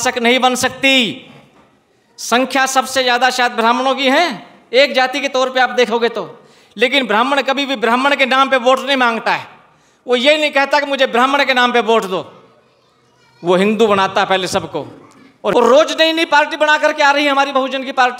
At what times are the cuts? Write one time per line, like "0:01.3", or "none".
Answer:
0:15.5

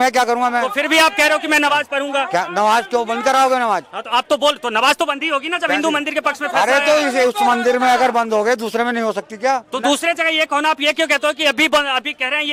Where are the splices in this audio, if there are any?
none

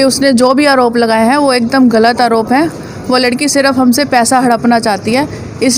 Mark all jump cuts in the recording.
none

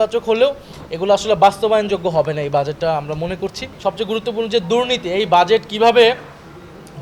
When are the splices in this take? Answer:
0:03.7

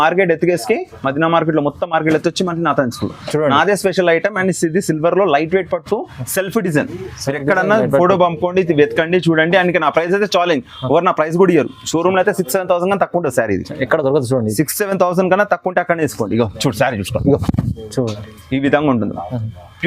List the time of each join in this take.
none

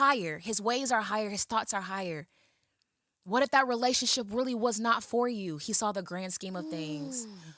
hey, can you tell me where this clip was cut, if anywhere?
none

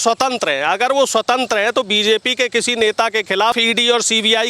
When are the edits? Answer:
0:03.6

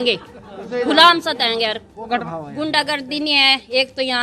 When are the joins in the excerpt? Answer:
0:02.1

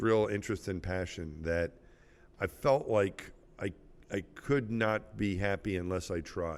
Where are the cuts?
none

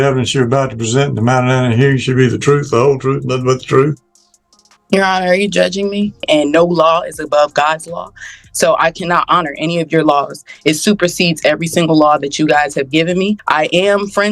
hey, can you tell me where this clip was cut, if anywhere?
0:06.2
0:13.4

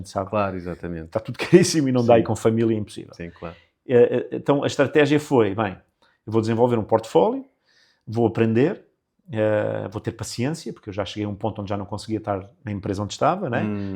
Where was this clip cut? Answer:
none

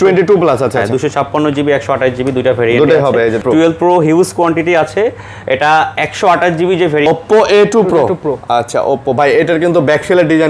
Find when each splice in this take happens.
0:03.4
0:07.1

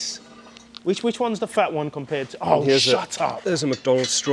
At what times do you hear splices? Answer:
none

